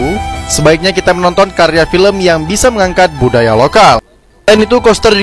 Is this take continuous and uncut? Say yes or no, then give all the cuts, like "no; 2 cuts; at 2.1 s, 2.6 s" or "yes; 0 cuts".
yes; 0 cuts